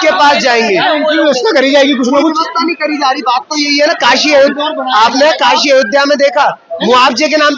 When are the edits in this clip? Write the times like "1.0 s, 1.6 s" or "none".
none

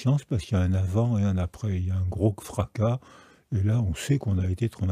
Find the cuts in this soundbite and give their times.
none

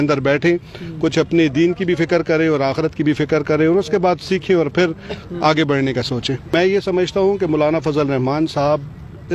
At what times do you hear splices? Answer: 6.5 s

